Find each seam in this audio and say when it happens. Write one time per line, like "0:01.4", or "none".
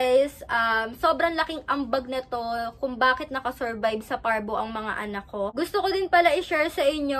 0:05.5